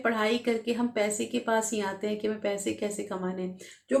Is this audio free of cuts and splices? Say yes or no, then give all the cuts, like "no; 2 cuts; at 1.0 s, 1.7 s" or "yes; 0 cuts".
yes; 0 cuts